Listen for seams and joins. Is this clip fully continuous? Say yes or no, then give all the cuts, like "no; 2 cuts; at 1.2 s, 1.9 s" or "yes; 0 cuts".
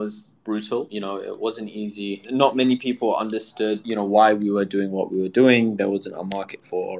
no; 3 cuts; at 0.9 s, 2.2 s, 3.8 s